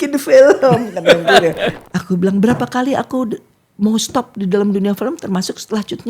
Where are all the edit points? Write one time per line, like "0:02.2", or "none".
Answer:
0:01.7